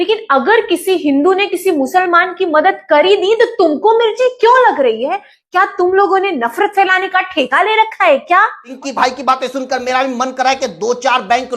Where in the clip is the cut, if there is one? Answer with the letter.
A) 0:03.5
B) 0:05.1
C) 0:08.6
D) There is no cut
C